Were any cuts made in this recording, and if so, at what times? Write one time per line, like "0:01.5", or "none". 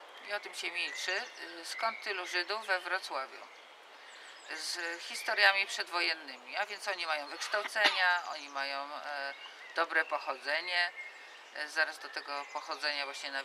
0:09.6